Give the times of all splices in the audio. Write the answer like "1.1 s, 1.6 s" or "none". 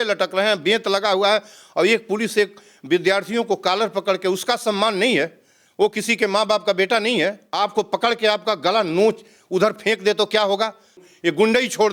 7.4 s, 11.0 s